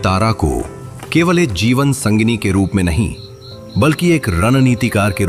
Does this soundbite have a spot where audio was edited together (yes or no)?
no